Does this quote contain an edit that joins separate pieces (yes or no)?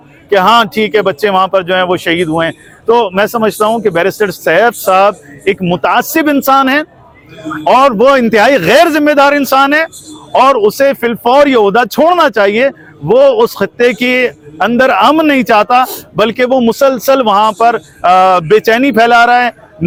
no